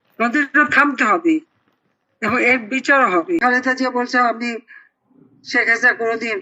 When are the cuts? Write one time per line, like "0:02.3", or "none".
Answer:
0:03.4